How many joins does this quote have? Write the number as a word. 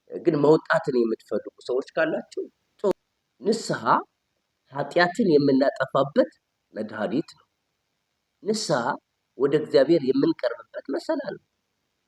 one